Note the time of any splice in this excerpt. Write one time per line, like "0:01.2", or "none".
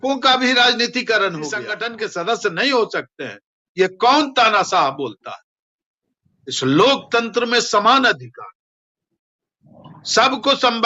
0:01.8